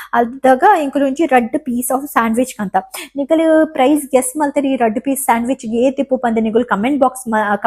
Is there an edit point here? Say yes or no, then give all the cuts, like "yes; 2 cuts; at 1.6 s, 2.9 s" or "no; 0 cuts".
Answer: no; 0 cuts